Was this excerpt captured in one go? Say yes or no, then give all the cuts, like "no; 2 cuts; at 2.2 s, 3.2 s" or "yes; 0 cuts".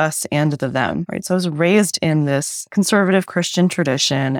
yes; 0 cuts